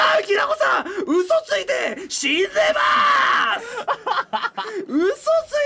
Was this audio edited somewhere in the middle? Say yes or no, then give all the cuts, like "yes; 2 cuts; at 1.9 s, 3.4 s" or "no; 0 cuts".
no; 0 cuts